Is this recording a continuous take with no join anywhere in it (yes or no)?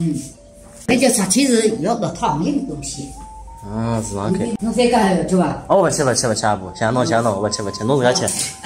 no